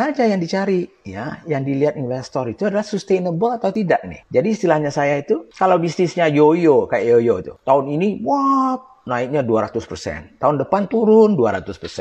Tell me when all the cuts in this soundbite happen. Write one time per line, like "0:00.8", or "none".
0:03.8
0:05.5
0:07.5